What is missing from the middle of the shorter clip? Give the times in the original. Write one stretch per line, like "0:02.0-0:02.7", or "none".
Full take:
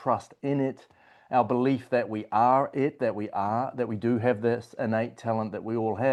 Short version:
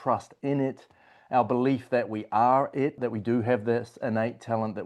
0:03.0-0:03.7